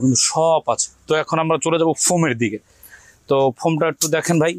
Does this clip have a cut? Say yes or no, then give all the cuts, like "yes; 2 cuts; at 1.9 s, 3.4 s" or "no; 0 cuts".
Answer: no; 0 cuts